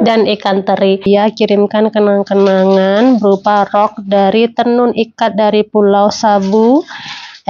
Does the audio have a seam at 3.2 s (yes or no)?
no